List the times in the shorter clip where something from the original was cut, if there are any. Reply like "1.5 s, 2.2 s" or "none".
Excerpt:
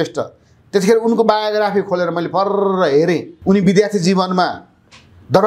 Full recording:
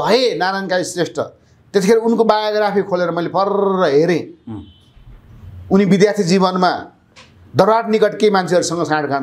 3.3 s